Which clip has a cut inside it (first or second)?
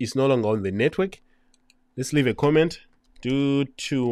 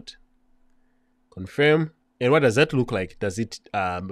second